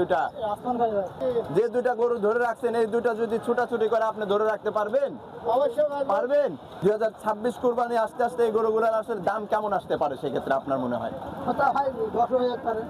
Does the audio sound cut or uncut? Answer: cut